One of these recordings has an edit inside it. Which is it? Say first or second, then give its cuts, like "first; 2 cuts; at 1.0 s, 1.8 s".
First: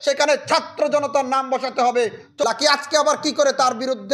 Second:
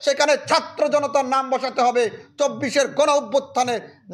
first; 1 cut; at 2.4 s